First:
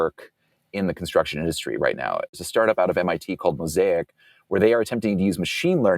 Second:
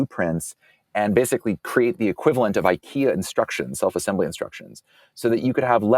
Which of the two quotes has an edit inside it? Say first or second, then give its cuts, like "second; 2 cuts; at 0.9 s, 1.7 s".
first; 1 cut; at 2.4 s